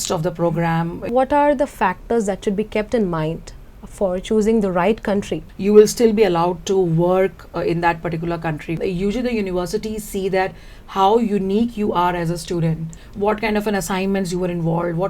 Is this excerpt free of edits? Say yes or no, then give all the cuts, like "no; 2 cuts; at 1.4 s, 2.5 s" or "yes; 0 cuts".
no; 4 cuts; at 1.0 s, 5.4 s, 8.8 s, 13.0 s